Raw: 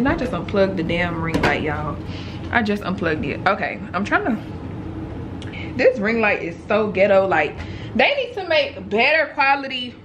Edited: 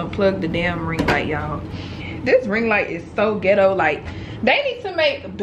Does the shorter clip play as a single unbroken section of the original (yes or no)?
no